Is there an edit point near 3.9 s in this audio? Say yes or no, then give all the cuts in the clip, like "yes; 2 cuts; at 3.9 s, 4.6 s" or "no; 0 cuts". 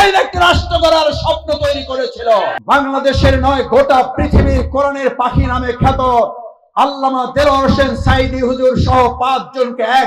no; 1 cut; at 2.5 s